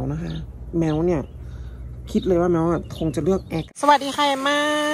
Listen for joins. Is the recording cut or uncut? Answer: cut